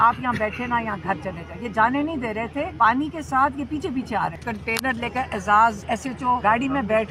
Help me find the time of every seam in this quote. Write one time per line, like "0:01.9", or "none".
0:02.7
0:04.5
0:06.2